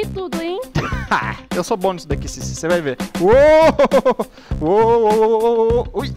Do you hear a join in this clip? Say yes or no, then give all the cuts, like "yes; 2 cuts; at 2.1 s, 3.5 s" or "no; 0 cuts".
no; 0 cuts